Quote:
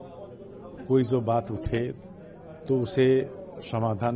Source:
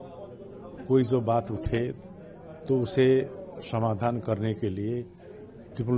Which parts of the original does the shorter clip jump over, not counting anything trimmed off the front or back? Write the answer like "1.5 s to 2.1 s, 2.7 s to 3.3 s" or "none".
none

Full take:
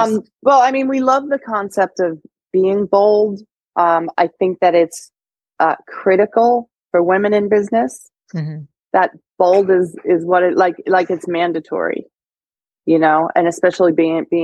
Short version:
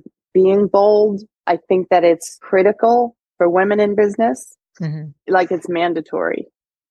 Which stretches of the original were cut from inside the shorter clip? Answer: 3.6 s to 4.1 s, 5.1 s to 5.9 s, 8.7 s to 10.8 s

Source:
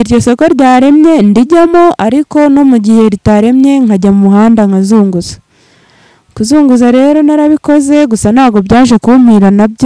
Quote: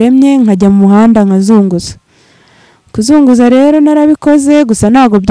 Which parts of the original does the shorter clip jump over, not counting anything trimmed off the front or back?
none

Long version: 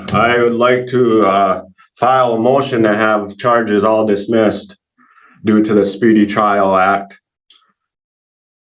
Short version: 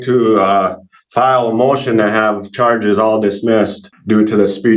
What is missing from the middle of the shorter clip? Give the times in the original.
4.7 s to 5.2 s

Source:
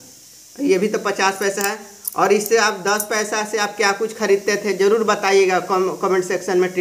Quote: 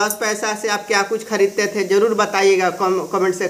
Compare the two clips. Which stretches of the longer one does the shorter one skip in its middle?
none

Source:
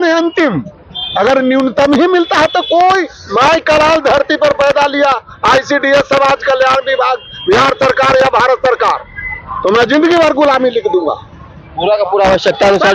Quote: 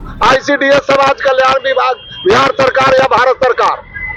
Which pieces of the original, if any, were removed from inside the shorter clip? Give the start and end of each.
none

